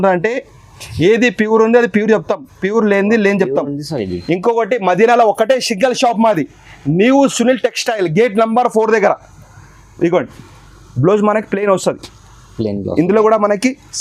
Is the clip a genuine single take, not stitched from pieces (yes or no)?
yes